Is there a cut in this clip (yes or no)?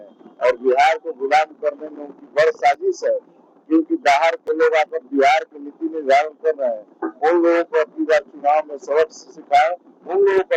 no